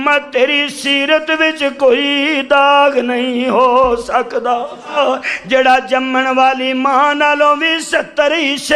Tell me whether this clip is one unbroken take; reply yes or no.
no